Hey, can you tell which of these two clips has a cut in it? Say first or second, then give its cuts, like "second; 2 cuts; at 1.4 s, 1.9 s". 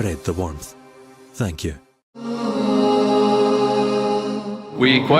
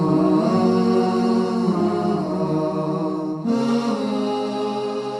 first; 1 cut; at 2.4 s